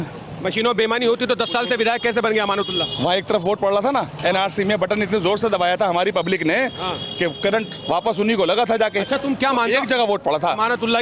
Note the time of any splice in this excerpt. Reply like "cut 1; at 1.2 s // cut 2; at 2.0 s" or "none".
none

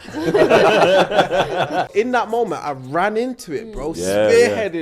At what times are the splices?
cut 1; at 1.9 s

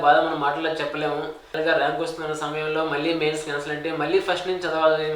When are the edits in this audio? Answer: cut 1; at 1.5 s

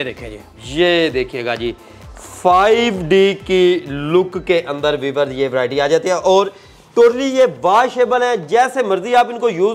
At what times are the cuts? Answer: none

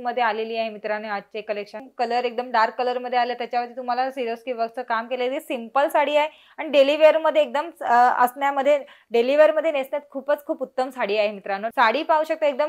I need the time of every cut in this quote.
cut 1; at 1.8 s // cut 2; at 11.7 s

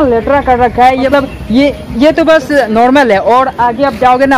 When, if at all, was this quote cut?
cut 1; at 1.1 s

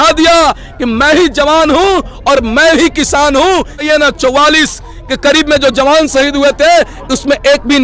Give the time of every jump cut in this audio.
cut 1; at 3.8 s

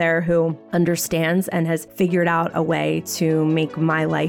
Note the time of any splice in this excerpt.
cut 1; at 1.9 s

